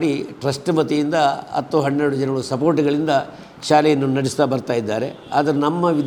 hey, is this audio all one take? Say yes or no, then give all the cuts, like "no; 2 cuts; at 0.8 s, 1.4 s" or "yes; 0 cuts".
yes; 0 cuts